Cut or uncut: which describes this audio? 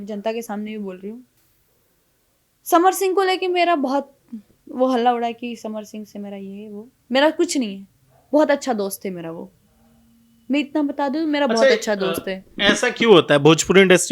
uncut